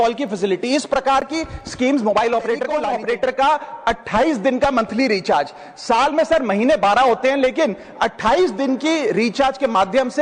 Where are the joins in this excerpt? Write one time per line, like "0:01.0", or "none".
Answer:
0:02.8